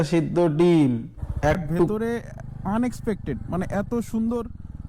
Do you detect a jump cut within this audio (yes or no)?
yes